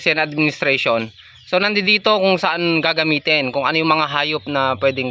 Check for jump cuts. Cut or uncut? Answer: uncut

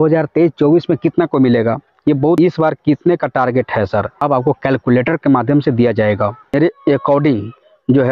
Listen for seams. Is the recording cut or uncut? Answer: cut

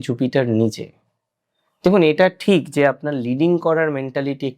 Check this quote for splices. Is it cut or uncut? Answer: uncut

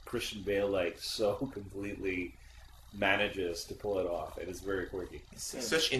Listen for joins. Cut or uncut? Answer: cut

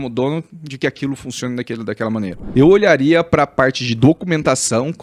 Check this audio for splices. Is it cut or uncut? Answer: cut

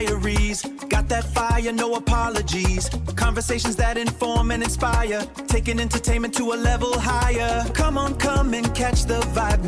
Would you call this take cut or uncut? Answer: uncut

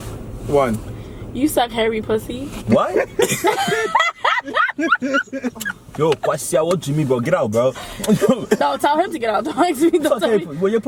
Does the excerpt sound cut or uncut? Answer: uncut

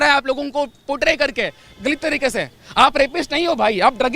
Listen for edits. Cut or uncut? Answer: uncut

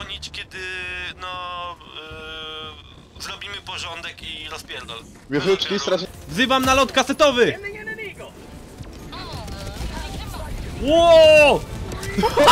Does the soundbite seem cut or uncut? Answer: cut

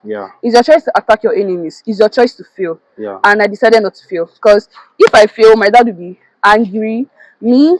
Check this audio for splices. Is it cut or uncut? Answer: uncut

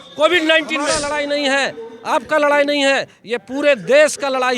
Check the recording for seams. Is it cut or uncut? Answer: cut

